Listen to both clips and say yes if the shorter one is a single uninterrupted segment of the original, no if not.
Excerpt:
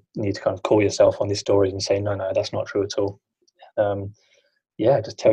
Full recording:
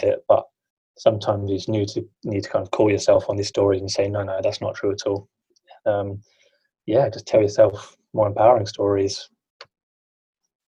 yes